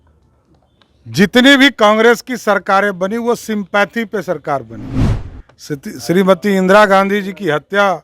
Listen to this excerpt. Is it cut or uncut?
uncut